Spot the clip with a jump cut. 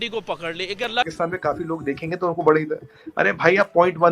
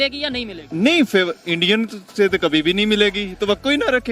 first; 1 cut; at 1.1 s

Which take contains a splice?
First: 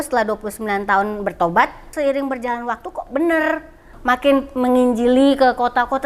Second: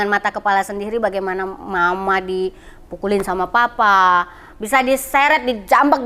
first; 2 cuts; at 1.9 s, 3.9 s

